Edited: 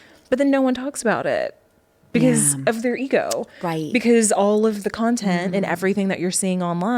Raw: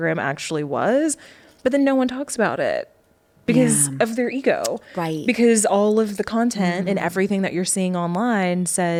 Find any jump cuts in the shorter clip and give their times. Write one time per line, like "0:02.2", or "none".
none